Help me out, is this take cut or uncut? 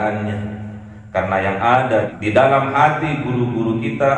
cut